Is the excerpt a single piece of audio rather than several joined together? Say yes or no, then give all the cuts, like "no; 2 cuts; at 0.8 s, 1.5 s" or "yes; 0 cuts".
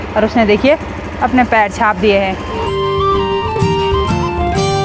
yes; 0 cuts